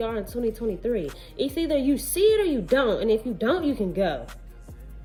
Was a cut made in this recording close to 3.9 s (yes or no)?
no